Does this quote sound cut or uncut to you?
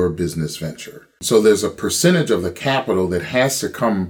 cut